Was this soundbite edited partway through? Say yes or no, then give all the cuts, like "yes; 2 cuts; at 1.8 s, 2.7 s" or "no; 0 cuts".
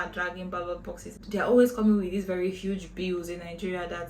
yes; 1 cut; at 1.2 s